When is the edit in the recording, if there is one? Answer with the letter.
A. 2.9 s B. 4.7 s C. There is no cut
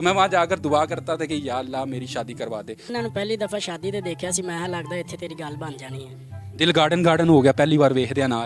A